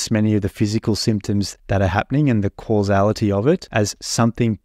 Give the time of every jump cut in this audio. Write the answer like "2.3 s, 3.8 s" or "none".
1.6 s, 3.7 s